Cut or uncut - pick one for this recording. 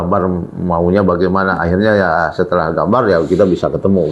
uncut